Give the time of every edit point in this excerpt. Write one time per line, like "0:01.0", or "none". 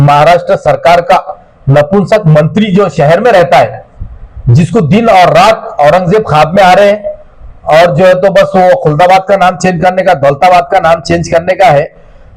none